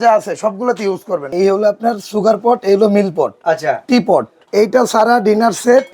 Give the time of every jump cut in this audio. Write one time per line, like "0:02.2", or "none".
0:01.3
0:04.4